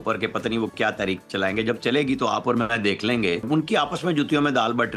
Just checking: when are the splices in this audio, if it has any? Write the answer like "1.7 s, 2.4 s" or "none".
3.5 s